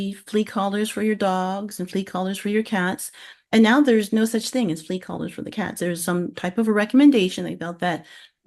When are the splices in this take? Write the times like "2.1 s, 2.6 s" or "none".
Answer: none